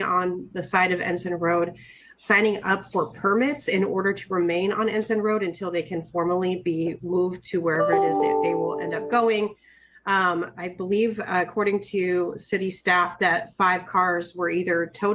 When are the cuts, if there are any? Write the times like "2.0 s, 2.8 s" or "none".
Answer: none